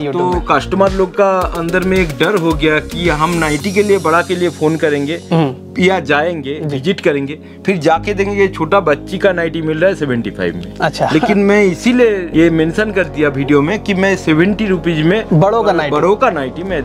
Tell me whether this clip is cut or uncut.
cut